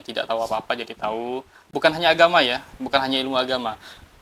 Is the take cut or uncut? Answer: uncut